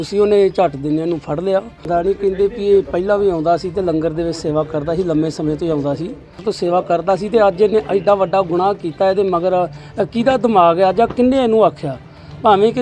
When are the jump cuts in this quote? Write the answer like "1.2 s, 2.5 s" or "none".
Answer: 1.8 s, 6.4 s